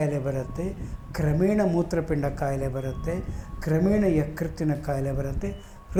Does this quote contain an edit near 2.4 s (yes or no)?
no